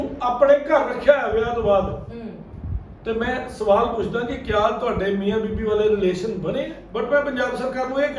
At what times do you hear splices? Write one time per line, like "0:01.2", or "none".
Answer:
0:06.8